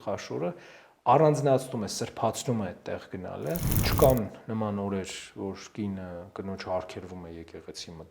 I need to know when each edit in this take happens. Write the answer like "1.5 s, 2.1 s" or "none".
3.7 s